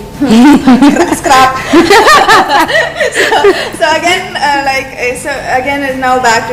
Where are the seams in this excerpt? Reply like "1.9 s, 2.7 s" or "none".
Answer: none